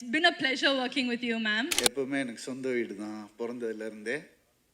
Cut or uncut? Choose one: cut